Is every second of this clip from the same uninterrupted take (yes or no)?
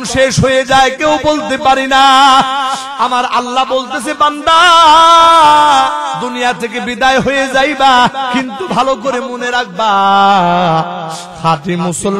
no